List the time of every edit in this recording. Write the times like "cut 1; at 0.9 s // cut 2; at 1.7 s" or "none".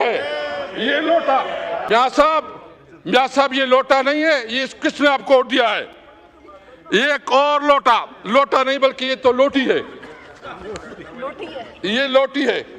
none